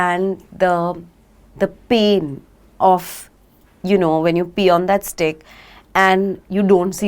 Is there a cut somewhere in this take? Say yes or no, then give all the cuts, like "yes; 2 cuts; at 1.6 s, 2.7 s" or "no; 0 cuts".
no; 0 cuts